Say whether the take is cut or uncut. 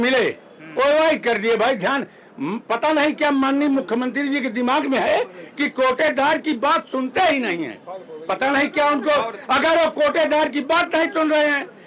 uncut